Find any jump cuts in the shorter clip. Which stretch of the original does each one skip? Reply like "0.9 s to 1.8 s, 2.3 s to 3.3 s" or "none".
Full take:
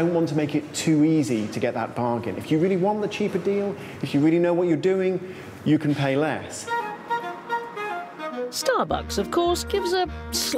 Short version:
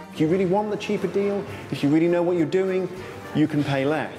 none